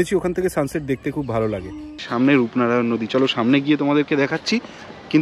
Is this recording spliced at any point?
yes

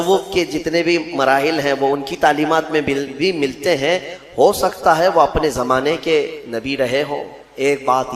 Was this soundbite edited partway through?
no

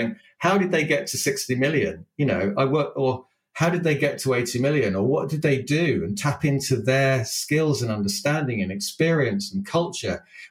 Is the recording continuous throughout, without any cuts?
yes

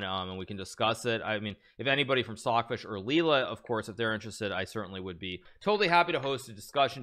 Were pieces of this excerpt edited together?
yes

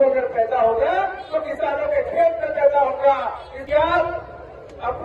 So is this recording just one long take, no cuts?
no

